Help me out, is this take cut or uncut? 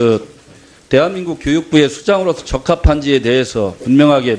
cut